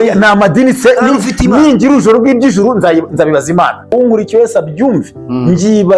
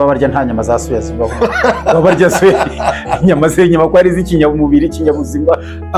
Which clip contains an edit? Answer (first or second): first